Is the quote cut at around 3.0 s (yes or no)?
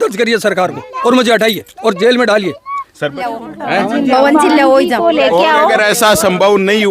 yes